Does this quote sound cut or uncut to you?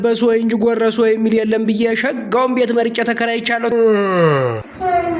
cut